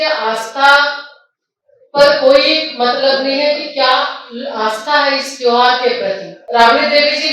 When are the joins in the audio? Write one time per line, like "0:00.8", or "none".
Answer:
0:06.3